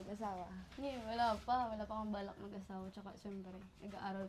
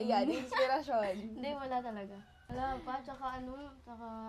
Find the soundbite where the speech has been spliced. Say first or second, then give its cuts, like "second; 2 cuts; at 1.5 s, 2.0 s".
second; 1 cut; at 2.4 s